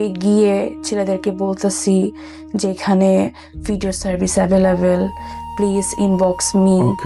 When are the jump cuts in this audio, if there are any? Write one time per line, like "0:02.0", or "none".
none